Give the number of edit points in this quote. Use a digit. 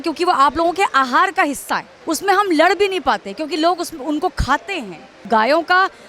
2